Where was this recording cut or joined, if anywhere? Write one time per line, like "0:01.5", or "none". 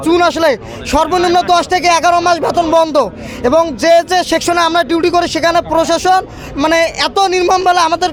none